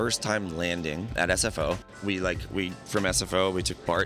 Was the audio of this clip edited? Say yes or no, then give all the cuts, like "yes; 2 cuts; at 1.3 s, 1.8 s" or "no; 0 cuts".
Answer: yes; 2 cuts; at 1.1 s, 1.9 s